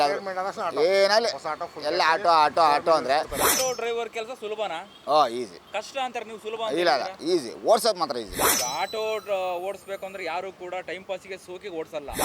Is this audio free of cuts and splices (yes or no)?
no